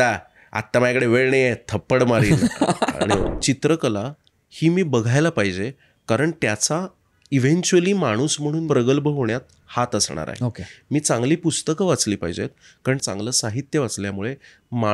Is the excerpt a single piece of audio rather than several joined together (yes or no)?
no